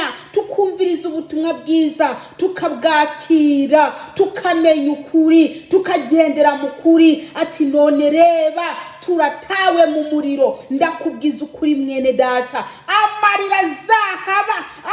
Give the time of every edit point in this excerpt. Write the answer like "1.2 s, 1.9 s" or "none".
none